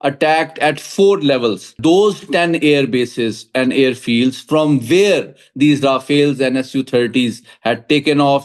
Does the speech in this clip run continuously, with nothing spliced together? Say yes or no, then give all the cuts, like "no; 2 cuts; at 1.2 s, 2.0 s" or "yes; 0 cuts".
no; 1 cut; at 1.8 s